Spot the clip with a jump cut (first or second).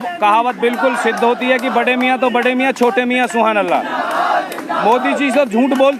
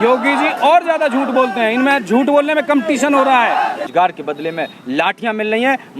second